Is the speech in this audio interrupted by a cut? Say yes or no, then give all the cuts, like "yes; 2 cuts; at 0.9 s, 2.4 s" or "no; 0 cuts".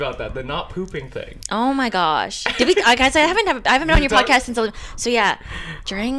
no; 0 cuts